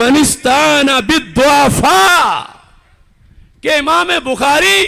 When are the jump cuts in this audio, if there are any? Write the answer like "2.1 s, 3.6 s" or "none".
none